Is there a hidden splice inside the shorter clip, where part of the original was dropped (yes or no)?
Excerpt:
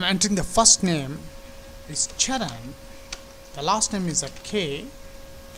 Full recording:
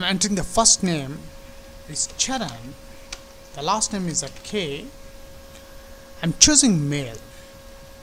no